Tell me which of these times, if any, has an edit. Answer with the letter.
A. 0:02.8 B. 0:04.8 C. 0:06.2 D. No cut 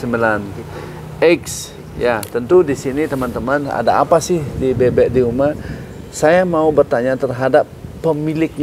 D